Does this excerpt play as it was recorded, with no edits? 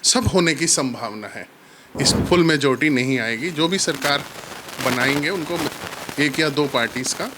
no; 1 cut; at 2.1 s

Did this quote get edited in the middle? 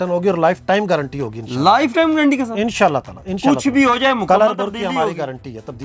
no; 0 cuts

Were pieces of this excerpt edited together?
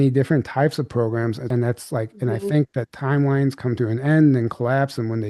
yes; 1 cut; at 1.4 s

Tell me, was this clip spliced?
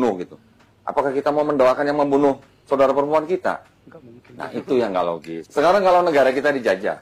yes; 1 cut; at 5.5 s

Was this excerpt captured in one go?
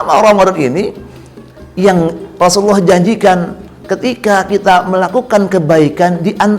yes; 0 cuts

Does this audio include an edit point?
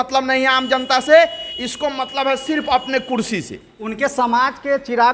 no; 0 cuts

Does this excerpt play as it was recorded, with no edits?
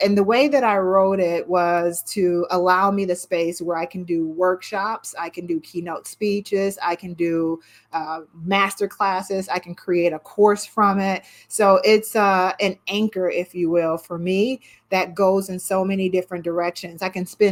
yes; 0 cuts

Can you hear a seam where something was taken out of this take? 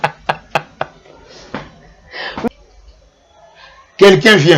yes; 1 cut; at 2.4 s

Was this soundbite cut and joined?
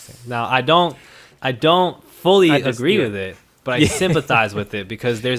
no; 0 cuts

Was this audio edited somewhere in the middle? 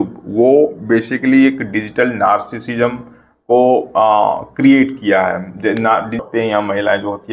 yes; 1 cut; at 6.2 s

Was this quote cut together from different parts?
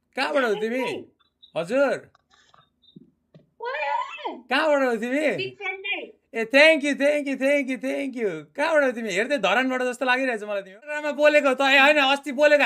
yes; 1 cut; at 11.1 s

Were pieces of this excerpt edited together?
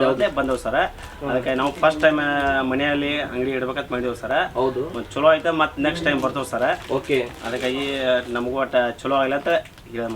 no; 0 cuts

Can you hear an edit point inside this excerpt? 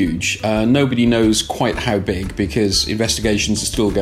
no; 0 cuts

